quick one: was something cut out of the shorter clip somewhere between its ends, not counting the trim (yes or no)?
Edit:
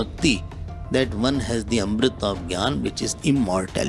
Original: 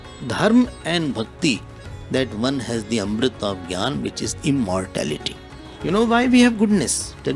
no